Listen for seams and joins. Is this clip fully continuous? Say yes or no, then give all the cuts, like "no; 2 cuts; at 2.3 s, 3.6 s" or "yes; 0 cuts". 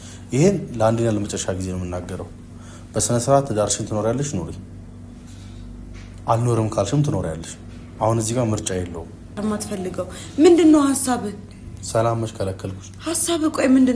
no; 1 cut; at 9.4 s